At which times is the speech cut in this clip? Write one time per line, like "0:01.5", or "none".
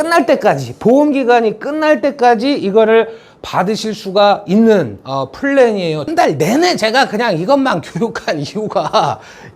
0:06.1